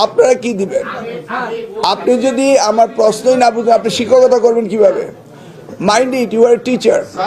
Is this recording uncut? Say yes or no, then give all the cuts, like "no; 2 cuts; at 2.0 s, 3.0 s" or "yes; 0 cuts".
yes; 0 cuts